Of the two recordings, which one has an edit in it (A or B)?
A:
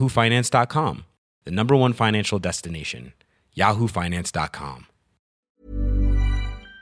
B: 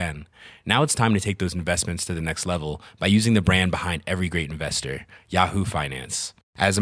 A